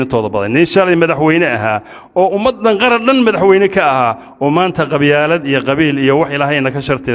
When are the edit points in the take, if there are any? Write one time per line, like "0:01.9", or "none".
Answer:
none